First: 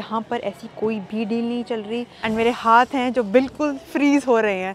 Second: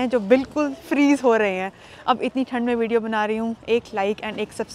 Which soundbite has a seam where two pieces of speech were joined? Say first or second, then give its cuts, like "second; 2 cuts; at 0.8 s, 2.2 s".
first; 1 cut; at 2.1 s